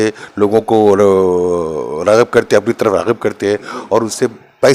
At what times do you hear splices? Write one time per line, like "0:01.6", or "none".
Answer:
none